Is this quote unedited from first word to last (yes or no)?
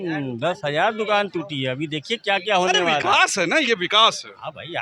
yes